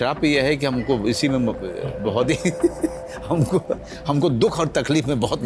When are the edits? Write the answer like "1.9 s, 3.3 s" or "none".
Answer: none